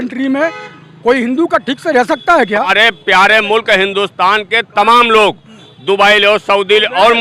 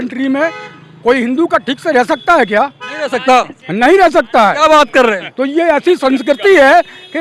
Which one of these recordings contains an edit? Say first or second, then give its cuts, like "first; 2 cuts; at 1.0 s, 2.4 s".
first; 1 cut; at 2.7 s